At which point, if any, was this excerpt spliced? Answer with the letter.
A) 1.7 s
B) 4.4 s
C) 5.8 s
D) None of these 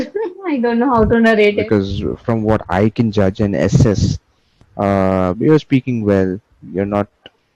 A